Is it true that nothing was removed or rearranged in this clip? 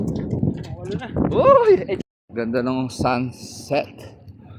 no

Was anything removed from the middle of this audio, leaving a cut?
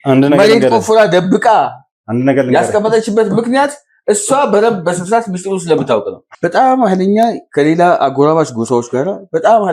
yes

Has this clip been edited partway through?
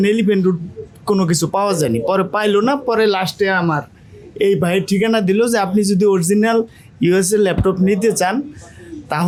no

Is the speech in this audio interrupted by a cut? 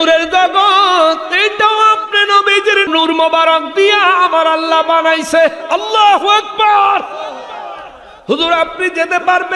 yes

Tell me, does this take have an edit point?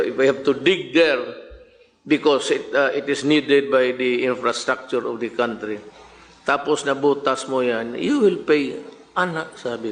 no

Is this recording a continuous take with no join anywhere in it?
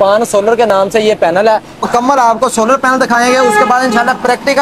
no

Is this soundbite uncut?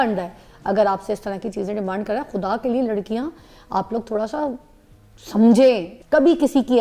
yes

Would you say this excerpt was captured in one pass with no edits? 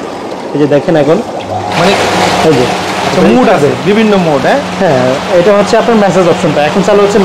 yes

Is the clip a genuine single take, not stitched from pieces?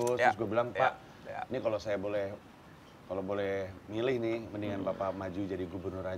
yes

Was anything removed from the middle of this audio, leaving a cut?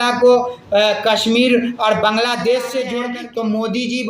yes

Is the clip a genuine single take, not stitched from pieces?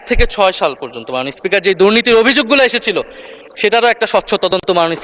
yes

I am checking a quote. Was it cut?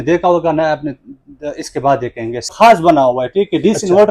yes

